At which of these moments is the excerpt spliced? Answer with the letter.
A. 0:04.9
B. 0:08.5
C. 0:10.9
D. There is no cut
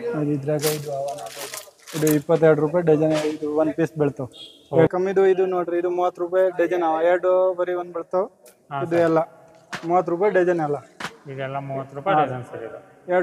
A